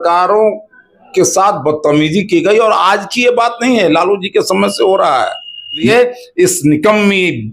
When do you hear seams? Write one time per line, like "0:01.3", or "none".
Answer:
0:05.9

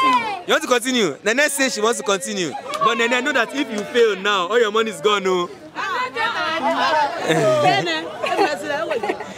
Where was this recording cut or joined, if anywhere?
0:02.6

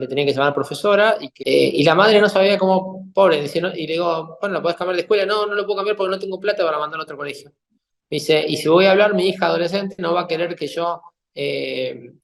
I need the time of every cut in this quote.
0:01.3

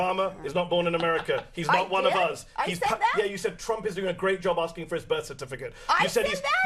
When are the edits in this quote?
none

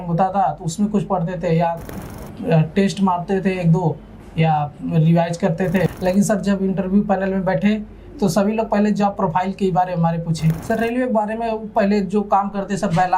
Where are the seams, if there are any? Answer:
0:01.9
0:05.9
0:10.6

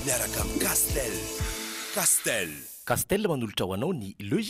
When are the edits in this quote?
none

